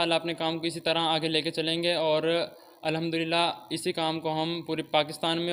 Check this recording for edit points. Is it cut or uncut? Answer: uncut